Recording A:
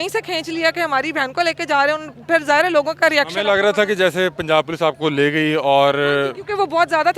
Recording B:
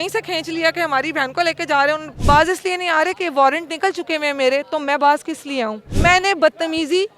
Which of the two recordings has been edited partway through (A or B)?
B